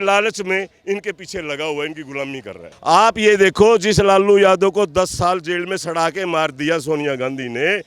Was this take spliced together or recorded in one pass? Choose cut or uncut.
cut